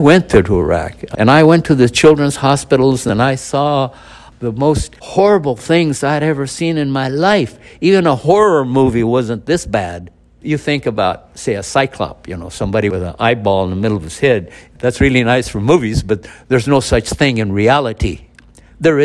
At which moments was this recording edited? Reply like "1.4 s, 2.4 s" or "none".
1.0 s, 3.0 s, 4.9 s, 10.4 s, 12.9 s

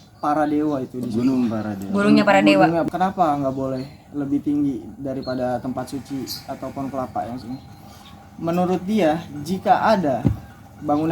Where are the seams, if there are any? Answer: 2.8 s

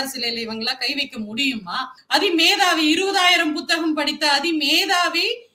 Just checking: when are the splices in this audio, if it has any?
2.0 s

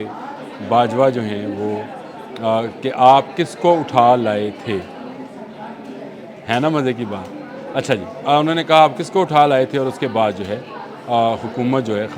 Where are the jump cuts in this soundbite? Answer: none

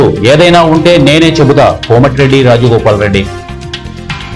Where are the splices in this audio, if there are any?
3.3 s

